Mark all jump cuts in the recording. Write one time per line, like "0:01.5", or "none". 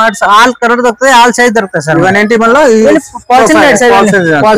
none

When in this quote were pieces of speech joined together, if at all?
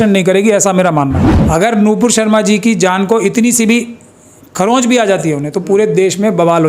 0:01.3

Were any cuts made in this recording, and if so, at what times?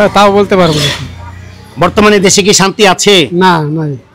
none

